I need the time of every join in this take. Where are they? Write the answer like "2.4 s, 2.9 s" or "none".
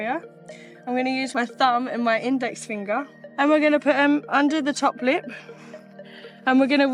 1.3 s, 3.2 s